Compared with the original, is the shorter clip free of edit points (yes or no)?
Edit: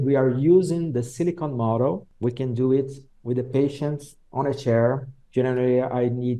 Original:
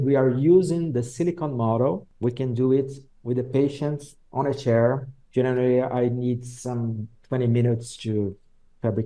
yes